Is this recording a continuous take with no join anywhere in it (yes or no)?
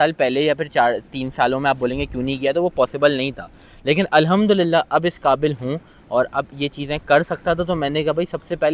yes